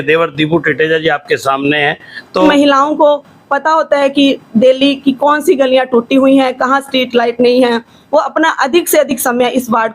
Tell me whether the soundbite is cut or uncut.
cut